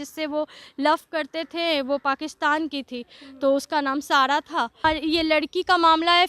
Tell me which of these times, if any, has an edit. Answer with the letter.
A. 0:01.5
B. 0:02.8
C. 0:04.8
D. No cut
C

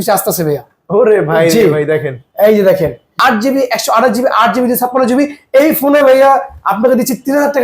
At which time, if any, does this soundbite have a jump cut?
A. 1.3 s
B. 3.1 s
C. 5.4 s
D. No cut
B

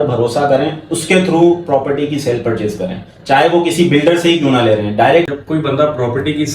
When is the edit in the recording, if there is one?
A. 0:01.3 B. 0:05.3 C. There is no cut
B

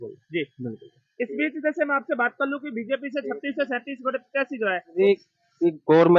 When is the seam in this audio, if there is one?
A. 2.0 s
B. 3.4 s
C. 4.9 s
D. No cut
C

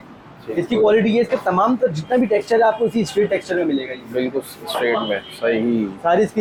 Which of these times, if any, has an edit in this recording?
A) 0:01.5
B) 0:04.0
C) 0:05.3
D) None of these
D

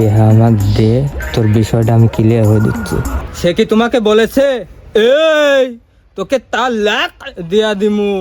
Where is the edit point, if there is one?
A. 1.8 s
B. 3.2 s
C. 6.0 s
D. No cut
B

